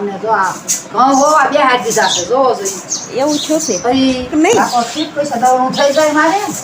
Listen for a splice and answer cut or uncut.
cut